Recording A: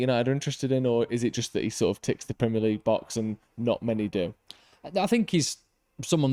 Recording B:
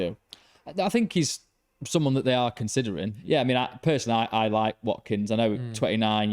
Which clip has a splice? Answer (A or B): B